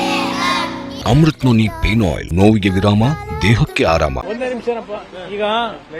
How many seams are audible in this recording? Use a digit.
3